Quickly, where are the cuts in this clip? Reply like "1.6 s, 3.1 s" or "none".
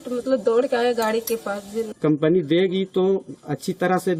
1.8 s